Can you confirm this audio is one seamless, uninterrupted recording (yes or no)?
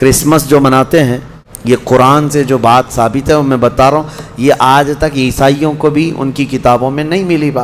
no